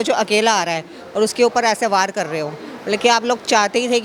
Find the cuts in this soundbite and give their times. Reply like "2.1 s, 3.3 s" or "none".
none